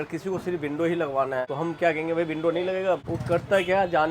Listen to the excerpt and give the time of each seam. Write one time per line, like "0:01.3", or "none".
0:01.5
0:03.1